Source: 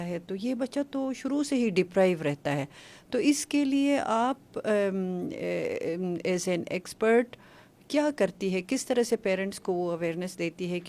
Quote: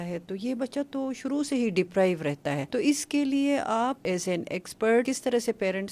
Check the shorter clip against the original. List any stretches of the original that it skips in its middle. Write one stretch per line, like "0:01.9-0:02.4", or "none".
0:02.6-0:03.0
0:04.4-0:06.2
0:07.3-0:08.7